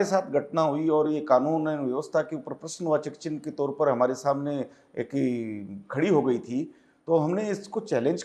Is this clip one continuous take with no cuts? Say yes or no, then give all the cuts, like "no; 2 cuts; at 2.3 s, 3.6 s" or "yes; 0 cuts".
yes; 0 cuts